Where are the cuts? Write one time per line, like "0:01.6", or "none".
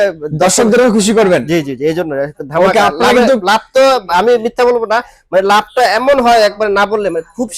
none

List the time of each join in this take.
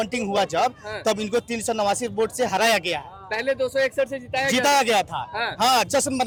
none

